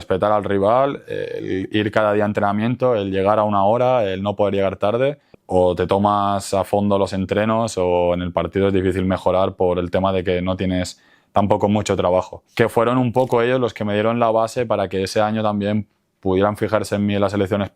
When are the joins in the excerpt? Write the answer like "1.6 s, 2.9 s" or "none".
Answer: 5.3 s, 12.4 s